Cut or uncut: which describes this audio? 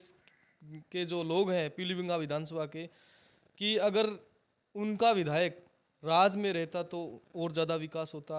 uncut